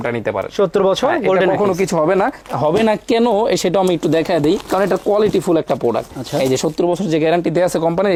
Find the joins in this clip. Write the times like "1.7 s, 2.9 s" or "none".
none

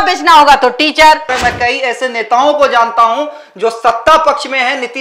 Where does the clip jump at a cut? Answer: 1.3 s

